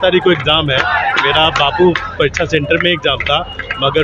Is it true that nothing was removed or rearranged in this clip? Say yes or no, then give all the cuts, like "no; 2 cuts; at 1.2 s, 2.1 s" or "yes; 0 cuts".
yes; 0 cuts